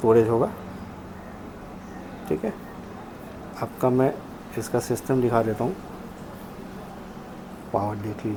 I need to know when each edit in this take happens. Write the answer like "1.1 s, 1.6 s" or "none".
none